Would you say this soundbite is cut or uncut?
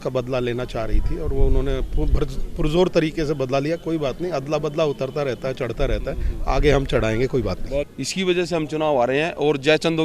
cut